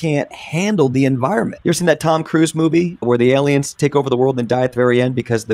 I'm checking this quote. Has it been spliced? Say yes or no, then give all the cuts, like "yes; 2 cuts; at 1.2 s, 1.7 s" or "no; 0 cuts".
yes; 2 cuts; at 1.5 s, 3.0 s